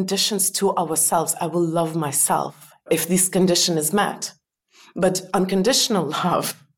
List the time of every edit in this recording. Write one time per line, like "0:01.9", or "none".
0:02.9